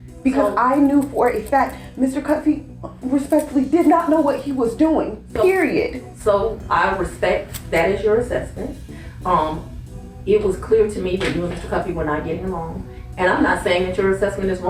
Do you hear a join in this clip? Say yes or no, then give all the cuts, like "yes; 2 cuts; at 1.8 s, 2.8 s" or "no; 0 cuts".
no; 0 cuts